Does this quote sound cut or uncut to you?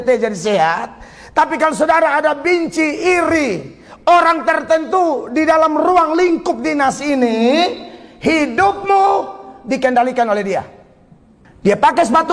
uncut